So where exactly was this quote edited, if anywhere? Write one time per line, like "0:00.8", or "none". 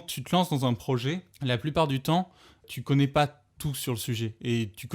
0:01.3
0:02.7